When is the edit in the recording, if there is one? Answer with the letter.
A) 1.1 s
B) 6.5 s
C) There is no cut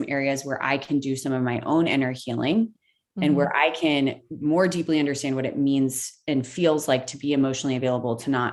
C